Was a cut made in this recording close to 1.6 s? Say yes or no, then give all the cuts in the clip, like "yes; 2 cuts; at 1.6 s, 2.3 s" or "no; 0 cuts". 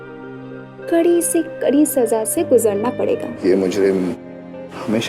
no; 1 cut; at 3.3 s